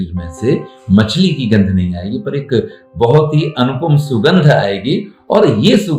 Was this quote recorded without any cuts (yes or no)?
yes